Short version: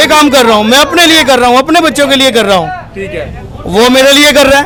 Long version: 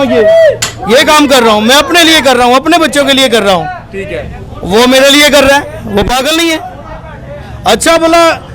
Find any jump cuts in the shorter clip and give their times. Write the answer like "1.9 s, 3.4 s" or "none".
none

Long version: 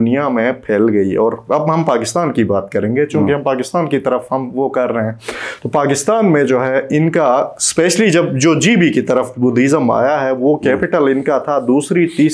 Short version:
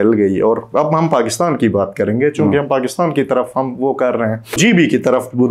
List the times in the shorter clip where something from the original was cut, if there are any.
4.6 s

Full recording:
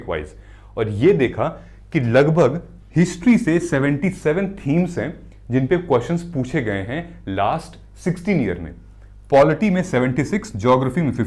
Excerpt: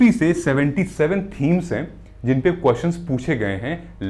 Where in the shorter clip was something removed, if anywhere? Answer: none

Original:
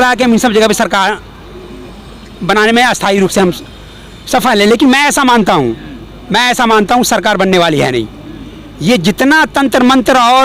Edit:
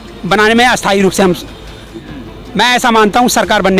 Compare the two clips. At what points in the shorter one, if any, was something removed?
2.0 s

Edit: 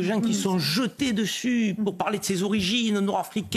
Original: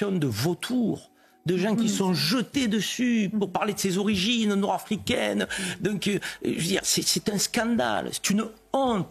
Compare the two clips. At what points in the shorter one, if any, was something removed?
none

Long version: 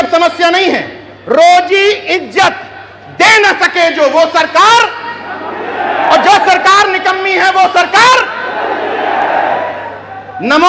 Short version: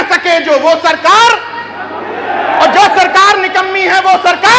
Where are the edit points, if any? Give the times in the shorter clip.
none

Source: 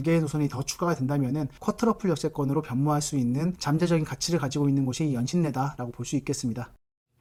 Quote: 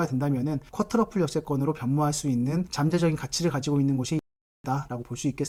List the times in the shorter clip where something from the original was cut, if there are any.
none

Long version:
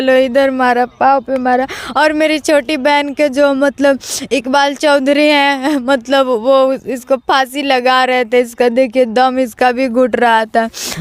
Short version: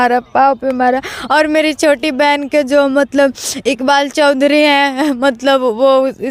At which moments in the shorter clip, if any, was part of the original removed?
none

